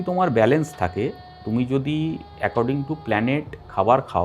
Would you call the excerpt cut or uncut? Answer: uncut